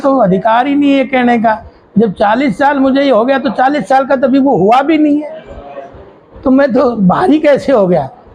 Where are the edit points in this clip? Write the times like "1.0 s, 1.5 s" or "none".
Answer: none